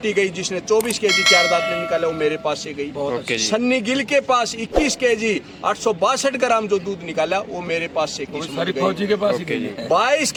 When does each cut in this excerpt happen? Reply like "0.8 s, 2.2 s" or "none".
none